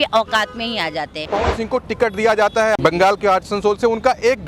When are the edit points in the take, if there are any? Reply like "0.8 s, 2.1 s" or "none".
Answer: 1.2 s, 2.8 s